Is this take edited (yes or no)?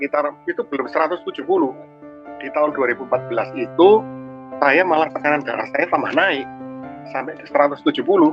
yes